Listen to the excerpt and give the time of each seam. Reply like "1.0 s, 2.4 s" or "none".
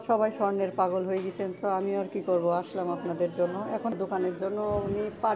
3.9 s